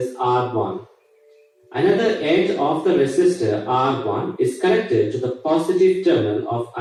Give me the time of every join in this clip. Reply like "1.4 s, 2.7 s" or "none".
none